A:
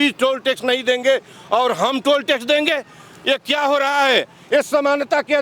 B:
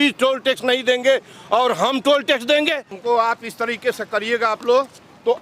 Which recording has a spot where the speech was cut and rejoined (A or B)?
B